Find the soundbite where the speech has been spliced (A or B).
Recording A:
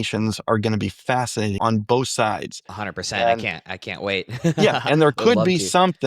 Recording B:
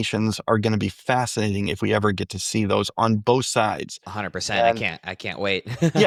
A